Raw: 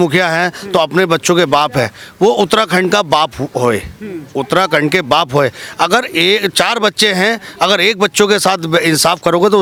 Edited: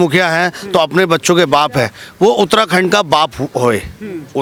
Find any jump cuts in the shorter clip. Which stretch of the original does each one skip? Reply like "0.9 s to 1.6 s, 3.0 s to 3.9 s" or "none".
none